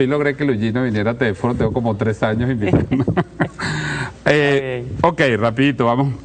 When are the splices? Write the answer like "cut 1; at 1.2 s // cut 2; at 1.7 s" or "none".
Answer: none